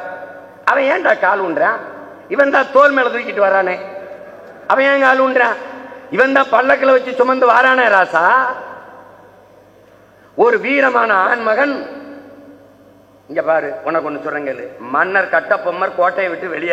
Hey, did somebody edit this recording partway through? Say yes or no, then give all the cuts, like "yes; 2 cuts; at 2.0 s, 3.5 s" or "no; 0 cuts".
no; 0 cuts